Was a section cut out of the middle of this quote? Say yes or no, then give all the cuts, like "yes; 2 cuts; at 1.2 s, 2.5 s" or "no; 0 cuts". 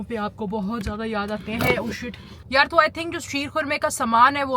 yes; 1 cut; at 2.3 s